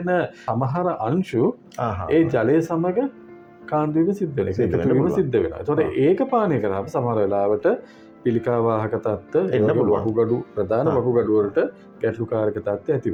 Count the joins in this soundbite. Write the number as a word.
zero